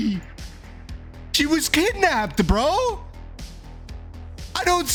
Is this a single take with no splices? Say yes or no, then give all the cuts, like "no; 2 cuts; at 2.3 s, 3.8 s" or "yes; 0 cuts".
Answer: yes; 0 cuts